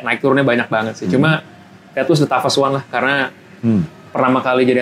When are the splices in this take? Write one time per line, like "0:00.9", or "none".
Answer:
none